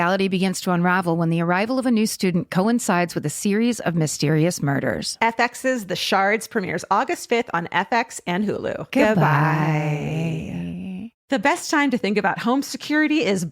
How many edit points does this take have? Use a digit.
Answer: 1